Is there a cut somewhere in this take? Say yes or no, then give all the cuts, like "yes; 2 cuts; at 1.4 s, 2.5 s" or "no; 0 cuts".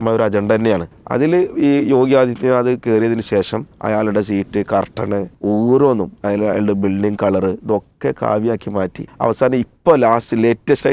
yes; 4 cuts; at 0.9 s, 3.7 s, 5.3 s, 9.0 s